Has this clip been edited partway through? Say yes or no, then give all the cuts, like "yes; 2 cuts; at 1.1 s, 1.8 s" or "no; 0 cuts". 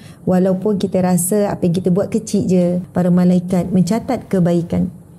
yes; 1 cut; at 2.8 s